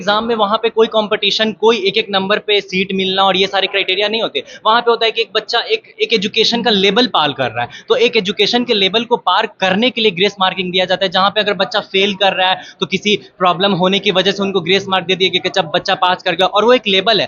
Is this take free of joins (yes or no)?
yes